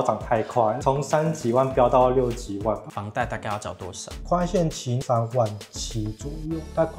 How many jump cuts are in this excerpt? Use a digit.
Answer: 2